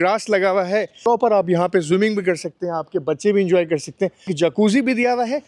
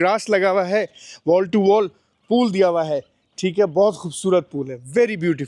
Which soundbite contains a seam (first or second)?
first